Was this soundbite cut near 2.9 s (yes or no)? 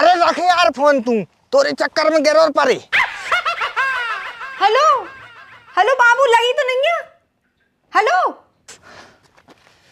no